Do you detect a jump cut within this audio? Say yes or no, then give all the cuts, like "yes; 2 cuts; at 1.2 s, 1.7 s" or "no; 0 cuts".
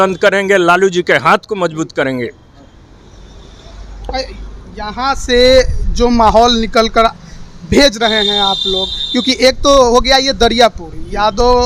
no; 0 cuts